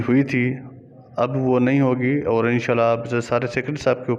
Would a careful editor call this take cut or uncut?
uncut